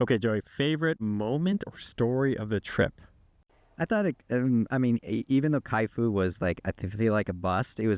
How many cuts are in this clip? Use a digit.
2